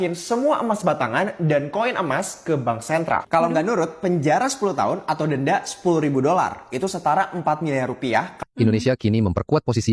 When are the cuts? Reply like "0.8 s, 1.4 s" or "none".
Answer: 8.4 s